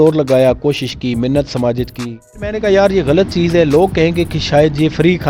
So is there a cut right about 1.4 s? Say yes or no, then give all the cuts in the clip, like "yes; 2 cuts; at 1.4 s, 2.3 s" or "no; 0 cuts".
no; 1 cut; at 2.6 s